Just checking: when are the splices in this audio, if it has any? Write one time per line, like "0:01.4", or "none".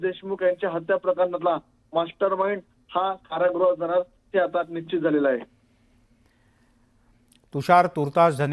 none

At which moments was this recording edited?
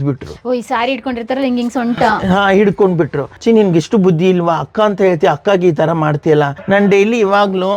0:03.3
0:06.6

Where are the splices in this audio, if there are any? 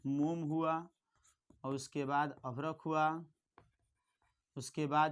none

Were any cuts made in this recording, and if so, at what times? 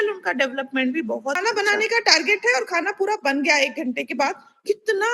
0:01.4

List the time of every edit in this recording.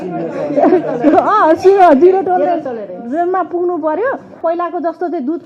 0:04.3

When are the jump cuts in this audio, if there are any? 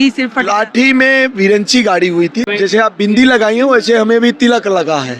0:02.5

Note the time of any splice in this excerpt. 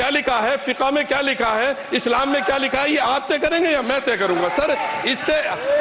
none

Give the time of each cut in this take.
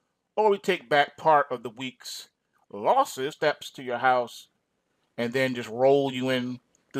none

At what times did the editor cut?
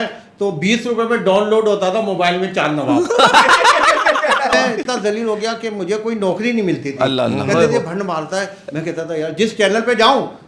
0:04.6

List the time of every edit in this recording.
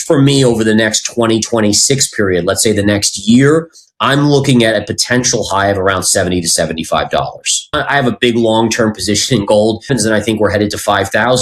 0:07.7
0:09.8

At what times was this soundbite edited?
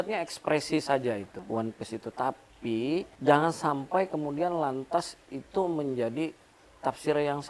0:01.4
0:03.1

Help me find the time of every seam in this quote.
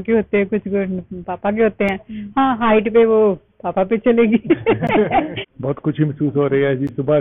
0:05.4

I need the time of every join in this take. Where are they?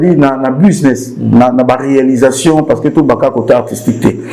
none

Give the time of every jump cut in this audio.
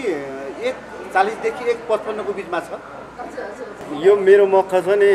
0:03.8

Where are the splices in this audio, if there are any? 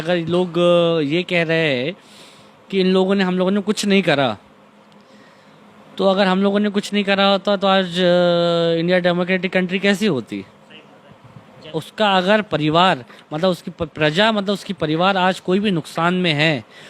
0:11.7

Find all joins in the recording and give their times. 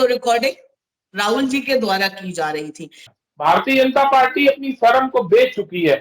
0:03.1

